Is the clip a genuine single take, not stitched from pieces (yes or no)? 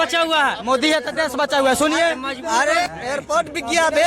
no